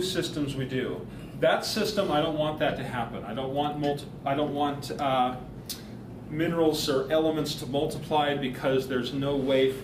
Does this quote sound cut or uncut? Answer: cut